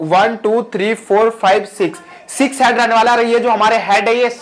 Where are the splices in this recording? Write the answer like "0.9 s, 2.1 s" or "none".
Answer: none